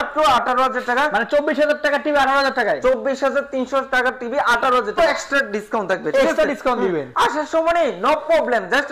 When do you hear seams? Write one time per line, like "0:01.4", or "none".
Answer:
0:05.0

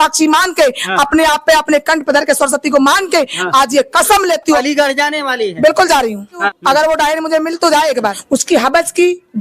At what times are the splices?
0:04.6
0:06.5
0:08.2

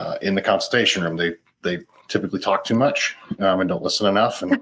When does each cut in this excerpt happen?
0:01.9

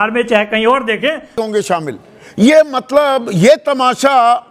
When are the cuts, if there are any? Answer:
0:01.3

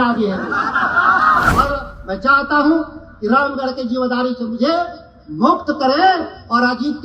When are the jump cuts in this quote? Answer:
0:01.5

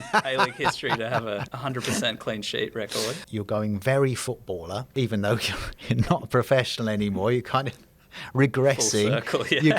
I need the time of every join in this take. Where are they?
0:03.2
0:04.8

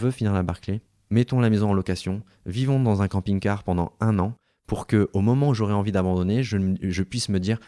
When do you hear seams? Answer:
0:00.9

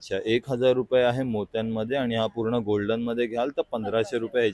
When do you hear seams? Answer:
none

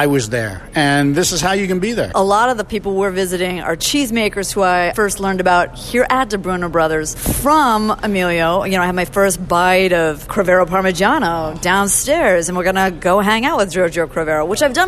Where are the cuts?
0:02.1
0:03.8
0:04.9
0:07.2

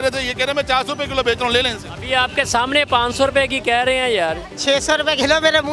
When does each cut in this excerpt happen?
0:04.5

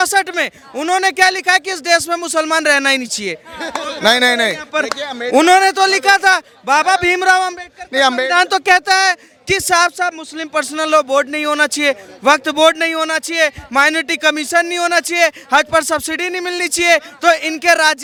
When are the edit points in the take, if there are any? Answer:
none

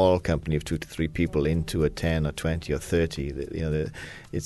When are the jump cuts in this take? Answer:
none

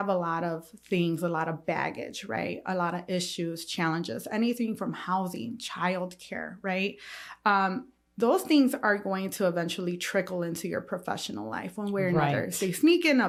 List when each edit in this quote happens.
none

